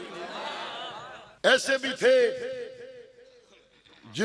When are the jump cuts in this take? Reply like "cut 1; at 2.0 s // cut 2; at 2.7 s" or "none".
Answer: cut 1; at 0.9 s